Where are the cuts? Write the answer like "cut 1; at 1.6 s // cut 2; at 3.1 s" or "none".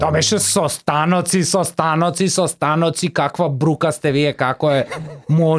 none